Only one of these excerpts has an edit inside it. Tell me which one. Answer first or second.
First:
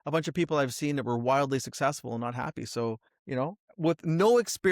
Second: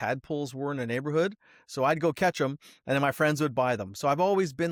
first